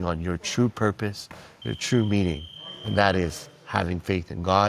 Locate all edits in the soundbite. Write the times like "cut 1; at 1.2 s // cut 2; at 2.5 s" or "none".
none